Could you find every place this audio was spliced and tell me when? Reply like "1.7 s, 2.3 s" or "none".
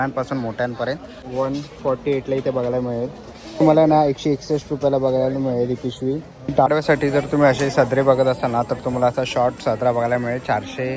1.2 s, 6.7 s